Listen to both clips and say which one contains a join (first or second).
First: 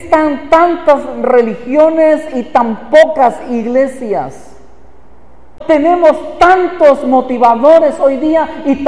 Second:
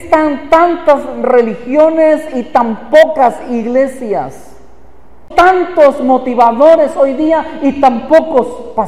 second